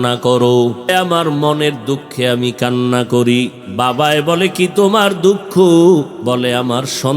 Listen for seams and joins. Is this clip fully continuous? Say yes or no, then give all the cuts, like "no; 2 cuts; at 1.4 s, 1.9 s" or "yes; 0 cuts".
no; 3 cuts; at 0.8 s, 3.6 s, 6.2 s